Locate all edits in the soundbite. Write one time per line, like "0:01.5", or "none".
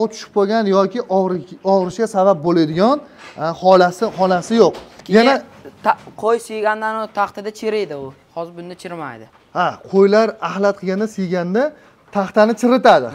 0:04.9

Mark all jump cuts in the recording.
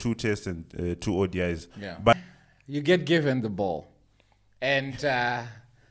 0:02.1

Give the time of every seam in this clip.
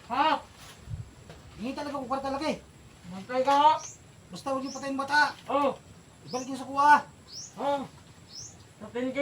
0:01.5

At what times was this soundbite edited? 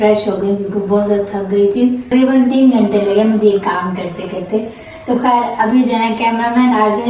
none

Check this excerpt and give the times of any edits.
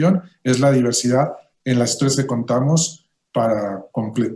none

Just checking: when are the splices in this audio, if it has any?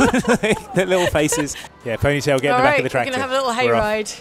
0:01.8

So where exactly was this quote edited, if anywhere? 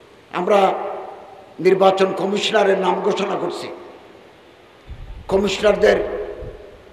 none

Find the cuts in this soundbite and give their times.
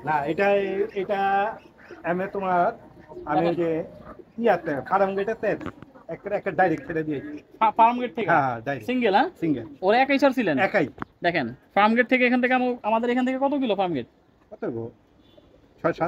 none

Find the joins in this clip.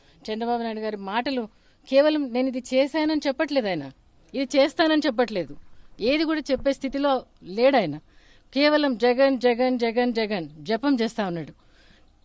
none

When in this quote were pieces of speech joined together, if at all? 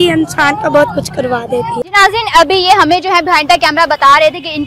none

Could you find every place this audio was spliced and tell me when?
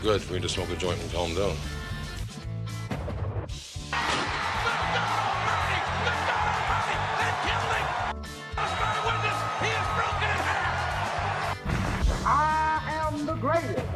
none

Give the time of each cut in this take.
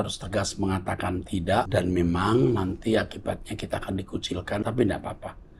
0:01.7
0:04.6

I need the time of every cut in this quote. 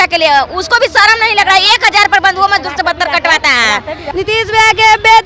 0:04.1

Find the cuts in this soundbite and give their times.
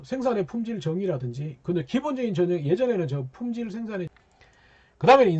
0:04.1

